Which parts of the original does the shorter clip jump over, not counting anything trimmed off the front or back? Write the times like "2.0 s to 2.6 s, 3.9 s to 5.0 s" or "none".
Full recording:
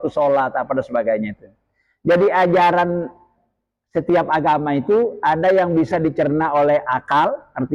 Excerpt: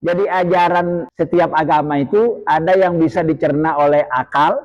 3.1 s to 3.8 s